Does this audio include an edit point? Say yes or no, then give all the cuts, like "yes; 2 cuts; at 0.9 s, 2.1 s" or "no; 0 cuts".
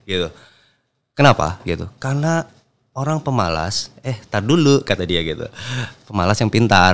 no; 0 cuts